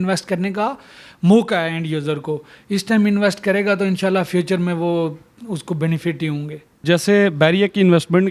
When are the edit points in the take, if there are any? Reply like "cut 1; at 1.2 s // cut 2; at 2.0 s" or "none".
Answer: none

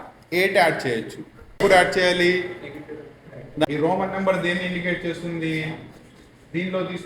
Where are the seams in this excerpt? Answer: cut 1; at 3.6 s

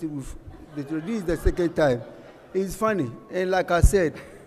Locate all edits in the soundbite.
none

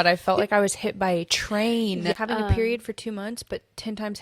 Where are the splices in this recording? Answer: cut 1; at 2.1 s

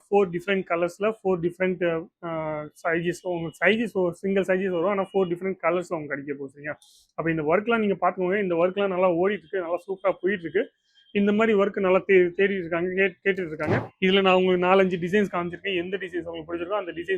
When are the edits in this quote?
cut 1; at 13.9 s

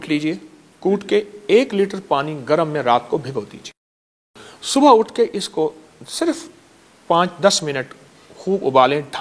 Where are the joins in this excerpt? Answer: none

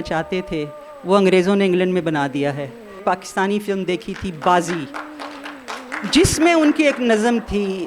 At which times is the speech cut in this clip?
cut 1; at 3.0 s

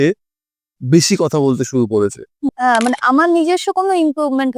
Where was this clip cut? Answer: cut 1; at 2.5 s

